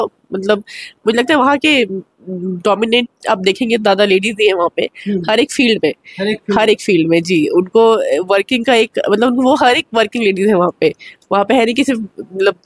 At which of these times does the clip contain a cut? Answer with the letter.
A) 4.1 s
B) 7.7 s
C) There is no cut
C